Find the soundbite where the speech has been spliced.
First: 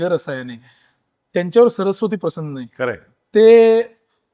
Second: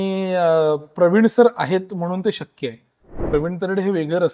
second; 1 cut; at 3.2 s

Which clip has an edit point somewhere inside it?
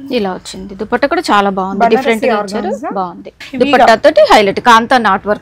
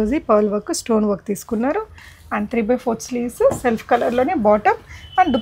first; 1 cut; at 3.4 s

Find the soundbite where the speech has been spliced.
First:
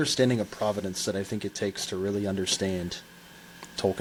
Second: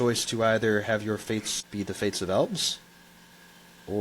second; 1 cut; at 1.6 s

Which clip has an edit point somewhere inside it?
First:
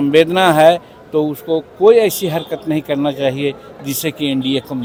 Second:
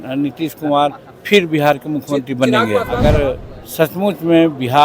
second; 1 cut; at 2.9 s

